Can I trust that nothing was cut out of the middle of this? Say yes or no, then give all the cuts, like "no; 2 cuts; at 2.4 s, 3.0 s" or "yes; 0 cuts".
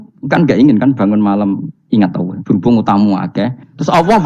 yes; 0 cuts